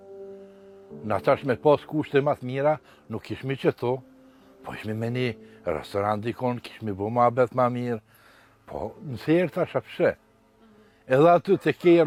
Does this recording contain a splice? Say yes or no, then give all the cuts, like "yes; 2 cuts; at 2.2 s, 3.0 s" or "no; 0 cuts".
no; 0 cuts